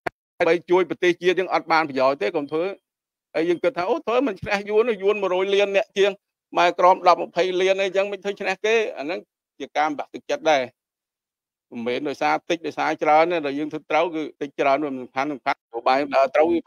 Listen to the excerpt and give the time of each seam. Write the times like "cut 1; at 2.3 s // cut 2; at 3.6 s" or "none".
cut 1; at 14.4 s // cut 2; at 15.7 s